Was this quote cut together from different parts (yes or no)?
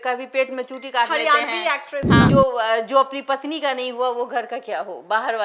yes